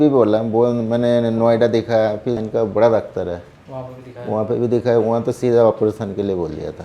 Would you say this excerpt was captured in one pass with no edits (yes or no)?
no